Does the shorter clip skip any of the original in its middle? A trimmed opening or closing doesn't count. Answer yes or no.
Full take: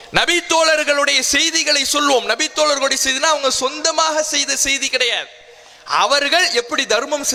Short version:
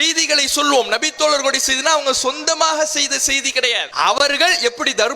yes